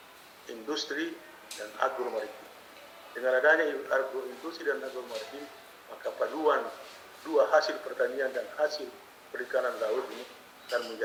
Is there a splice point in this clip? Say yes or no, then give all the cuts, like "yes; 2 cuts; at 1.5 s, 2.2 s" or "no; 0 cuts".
no; 0 cuts